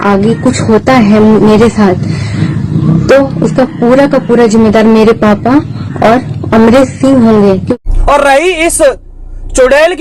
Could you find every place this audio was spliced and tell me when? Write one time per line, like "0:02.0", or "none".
0:07.7